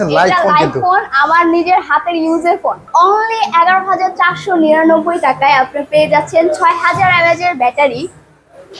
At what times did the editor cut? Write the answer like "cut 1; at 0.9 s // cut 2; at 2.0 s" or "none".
cut 1; at 2.8 s